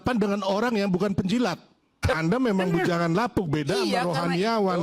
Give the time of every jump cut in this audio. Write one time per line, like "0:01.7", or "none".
0:02.0